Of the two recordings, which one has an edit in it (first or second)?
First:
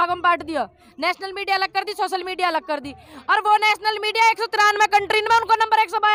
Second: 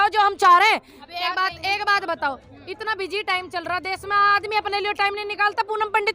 second